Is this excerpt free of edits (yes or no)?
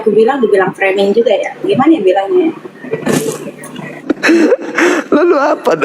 no